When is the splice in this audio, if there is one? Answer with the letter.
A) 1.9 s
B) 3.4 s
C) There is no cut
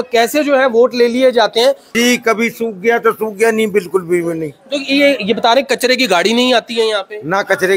A